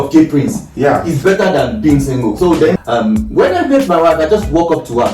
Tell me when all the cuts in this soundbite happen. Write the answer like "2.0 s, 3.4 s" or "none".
2.7 s